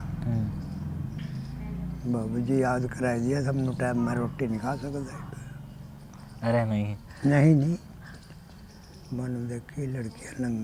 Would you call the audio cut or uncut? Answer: uncut